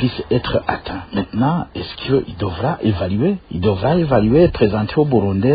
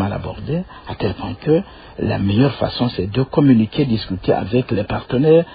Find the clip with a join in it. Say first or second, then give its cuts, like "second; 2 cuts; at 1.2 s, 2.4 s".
first; 2 cuts; at 1.0 s, 3.5 s